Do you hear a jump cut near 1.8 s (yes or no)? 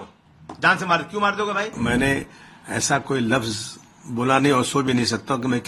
yes